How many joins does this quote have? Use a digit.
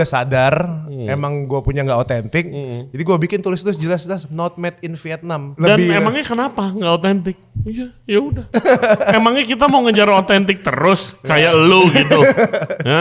2